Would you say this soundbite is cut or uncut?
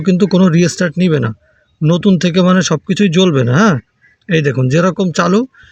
uncut